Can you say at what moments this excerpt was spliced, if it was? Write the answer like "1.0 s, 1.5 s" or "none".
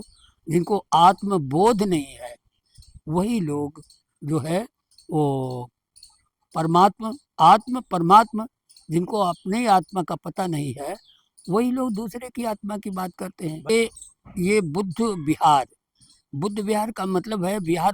13.7 s